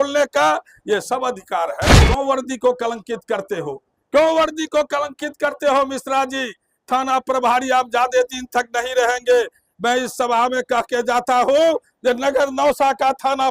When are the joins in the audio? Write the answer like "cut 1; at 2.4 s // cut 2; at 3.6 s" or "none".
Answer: cut 1; at 2.1 s